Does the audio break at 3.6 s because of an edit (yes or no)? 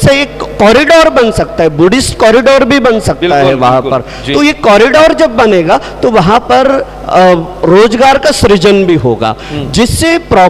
no